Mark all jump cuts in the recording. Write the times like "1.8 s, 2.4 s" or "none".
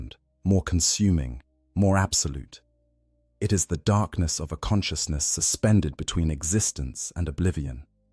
none